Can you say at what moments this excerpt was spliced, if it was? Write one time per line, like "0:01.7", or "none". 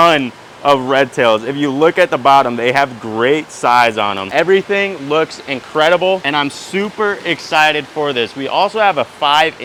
none